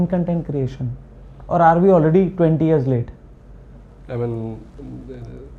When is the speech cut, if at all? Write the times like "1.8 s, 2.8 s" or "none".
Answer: none